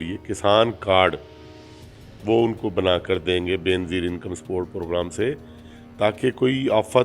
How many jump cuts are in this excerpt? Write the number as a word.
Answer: zero